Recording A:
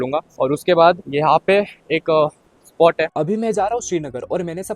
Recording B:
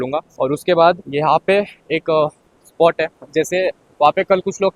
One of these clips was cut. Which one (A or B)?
A